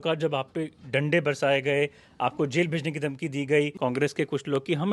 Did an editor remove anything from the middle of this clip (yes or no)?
yes